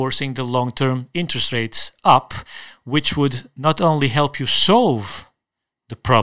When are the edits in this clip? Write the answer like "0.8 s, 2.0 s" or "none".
none